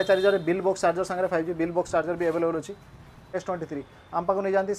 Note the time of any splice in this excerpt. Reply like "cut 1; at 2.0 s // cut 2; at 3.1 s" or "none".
cut 1; at 3.4 s

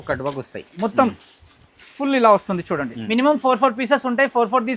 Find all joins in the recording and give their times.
cut 1; at 2.9 s

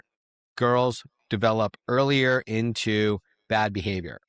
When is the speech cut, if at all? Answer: none

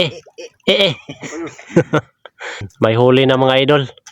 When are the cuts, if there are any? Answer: cut 1; at 2.7 s

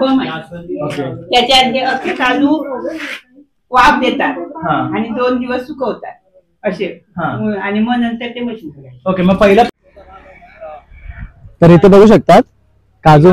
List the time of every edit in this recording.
cut 1; at 9.7 s

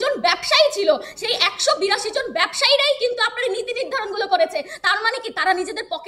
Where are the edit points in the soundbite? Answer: none

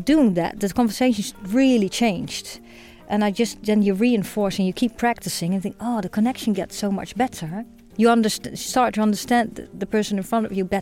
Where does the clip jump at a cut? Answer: cut 1; at 7.8 s

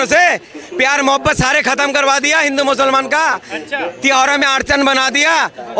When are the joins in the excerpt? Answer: none

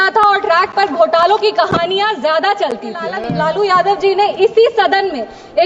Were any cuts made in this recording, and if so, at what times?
cut 1; at 3.2 s

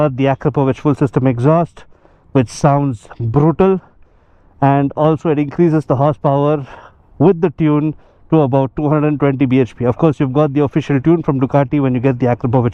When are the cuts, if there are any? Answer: none

